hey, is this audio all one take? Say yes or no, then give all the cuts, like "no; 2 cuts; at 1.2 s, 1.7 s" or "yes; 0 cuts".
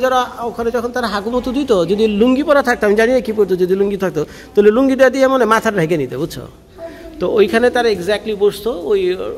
yes; 0 cuts